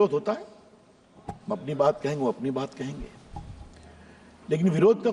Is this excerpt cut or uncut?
uncut